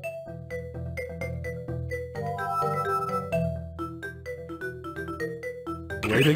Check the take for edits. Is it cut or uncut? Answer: uncut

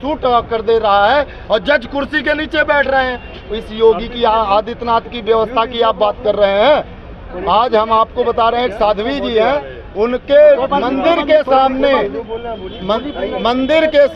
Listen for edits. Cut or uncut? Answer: uncut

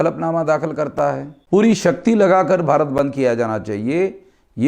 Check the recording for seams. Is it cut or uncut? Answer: cut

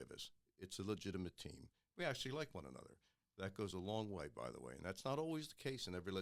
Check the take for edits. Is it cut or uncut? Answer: uncut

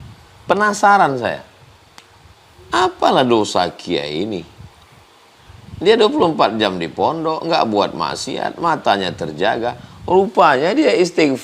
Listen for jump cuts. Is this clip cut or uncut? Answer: uncut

